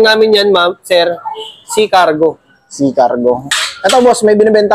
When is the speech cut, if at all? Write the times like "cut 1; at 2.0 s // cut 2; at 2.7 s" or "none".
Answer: cut 1; at 3.5 s